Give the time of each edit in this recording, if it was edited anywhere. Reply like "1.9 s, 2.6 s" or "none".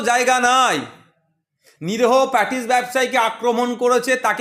none

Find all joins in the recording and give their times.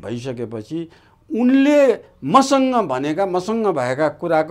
none

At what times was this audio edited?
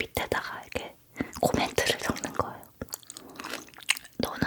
none

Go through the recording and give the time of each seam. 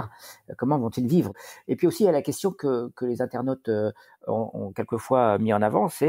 1.4 s

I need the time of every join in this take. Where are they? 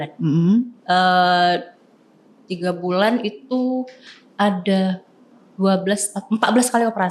none

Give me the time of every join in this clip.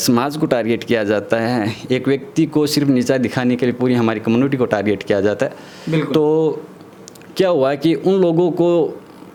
none

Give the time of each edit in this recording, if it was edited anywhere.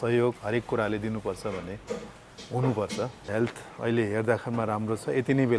3.3 s

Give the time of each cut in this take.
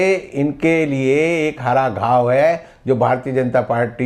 none

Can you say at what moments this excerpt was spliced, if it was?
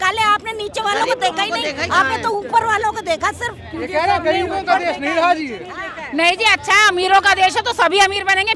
none

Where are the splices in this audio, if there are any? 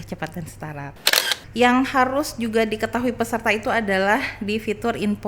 1.1 s

